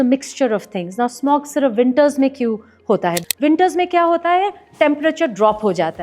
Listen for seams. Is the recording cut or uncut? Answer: cut